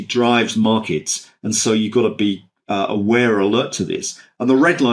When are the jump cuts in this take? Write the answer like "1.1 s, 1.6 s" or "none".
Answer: none